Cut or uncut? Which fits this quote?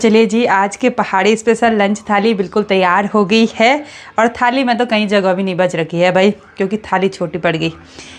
uncut